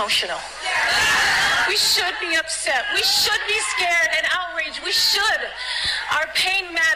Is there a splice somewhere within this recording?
no; 0 cuts

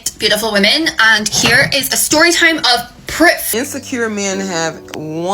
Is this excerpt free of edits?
no; 1 cut; at 3.4 s

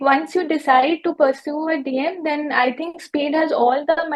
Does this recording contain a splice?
no; 0 cuts

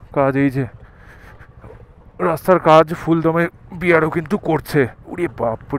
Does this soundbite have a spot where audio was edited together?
no; 0 cuts

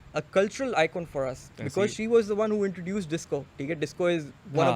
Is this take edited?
no; 0 cuts

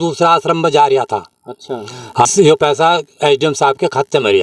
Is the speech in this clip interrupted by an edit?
yes; 1 cut; at 2.3 s

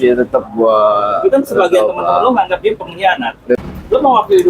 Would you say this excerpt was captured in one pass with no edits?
no; 1 cut; at 3.6 s

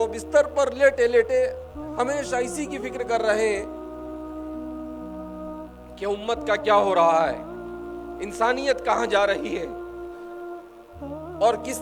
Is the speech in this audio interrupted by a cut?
no; 0 cuts

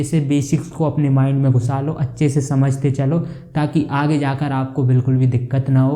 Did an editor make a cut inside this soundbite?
no; 0 cuts

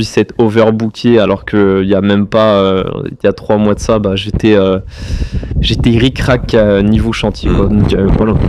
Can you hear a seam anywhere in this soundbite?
no; 0 cuts

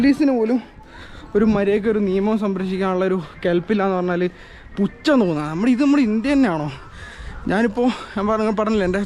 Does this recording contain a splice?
no; 0 cuts

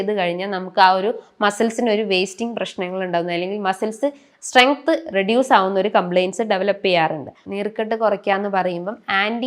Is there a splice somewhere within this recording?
yes; 1 cut; at 7.4 s

